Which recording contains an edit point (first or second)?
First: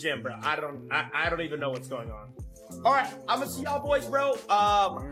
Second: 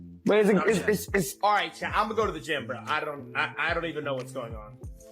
second